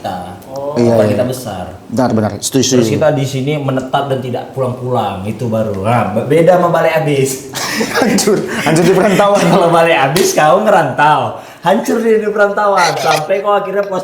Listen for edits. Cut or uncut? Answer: uncut